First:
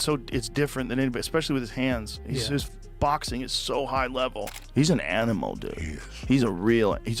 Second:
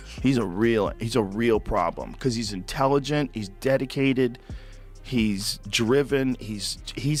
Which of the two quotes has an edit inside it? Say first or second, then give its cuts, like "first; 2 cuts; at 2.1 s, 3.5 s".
first; 1 cut; at 4.5 s